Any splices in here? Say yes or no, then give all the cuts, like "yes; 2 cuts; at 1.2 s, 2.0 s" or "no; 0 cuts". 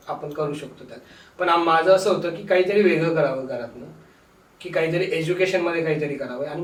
no; 0 cuts